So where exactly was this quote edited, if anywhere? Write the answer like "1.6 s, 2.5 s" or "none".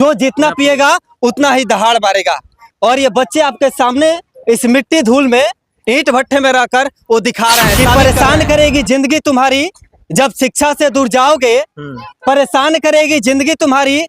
7.8 s